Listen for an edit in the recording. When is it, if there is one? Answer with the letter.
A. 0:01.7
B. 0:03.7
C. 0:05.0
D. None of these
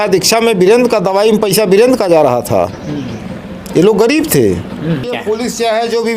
C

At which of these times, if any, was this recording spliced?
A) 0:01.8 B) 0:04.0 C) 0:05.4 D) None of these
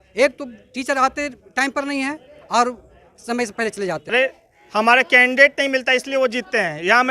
B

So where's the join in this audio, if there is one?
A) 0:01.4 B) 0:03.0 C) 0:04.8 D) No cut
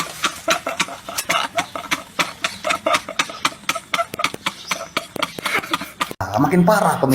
D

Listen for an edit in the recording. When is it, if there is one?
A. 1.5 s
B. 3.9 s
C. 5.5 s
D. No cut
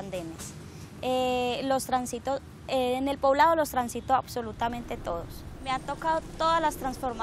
C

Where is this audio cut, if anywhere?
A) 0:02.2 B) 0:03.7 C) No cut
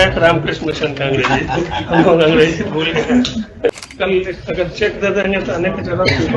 B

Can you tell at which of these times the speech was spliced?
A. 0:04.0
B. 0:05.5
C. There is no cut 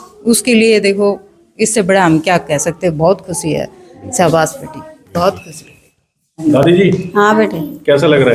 C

